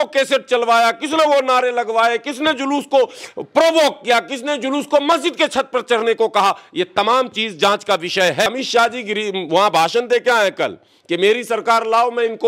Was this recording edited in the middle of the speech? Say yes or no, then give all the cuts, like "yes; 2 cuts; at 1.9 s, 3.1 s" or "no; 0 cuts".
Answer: yes; 1 cut; at 8.5 s